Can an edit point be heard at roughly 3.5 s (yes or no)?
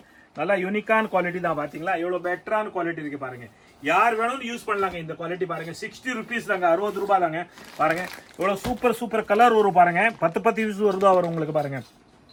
no